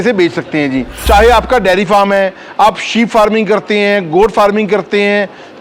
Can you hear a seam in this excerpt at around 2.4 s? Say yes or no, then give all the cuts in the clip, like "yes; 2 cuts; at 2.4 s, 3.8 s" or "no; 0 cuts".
no; 1 cut; at 0.9 s